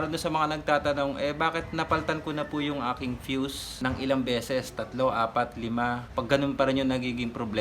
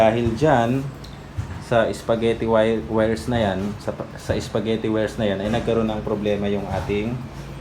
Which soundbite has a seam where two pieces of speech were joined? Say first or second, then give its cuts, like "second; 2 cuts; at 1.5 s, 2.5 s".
first; 2 cuts; at 3.7 s, 6.0 s